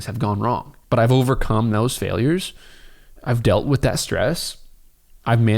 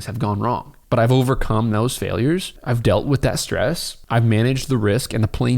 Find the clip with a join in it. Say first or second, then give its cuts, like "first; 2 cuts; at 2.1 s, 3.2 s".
second; 2 cuts; at 2.5 s, 3.9 s